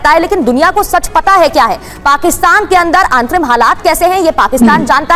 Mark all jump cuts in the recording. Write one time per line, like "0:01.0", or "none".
none